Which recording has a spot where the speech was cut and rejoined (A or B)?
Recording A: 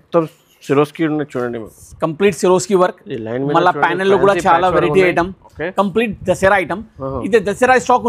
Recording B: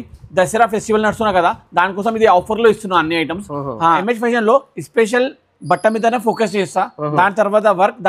B